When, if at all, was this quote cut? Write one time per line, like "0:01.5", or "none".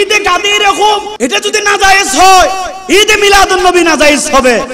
0:01.1